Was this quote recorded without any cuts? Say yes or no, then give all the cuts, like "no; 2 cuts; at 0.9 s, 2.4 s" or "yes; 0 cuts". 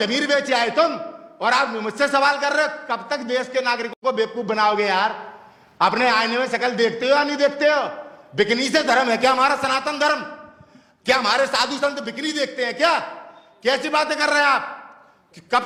yes; 0 cuts